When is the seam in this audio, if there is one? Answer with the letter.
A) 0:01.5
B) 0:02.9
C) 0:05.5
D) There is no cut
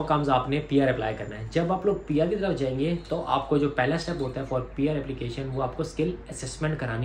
D